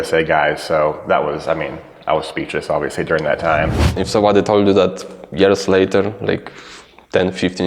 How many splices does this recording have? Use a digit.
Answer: 1